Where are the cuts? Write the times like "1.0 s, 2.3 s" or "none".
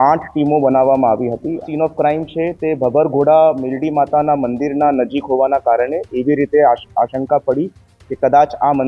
1.6 s